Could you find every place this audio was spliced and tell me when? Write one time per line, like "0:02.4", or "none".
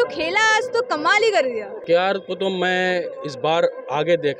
0:01.8